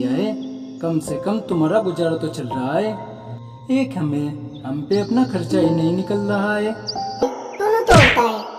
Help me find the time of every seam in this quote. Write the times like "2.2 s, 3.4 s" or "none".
7.2 s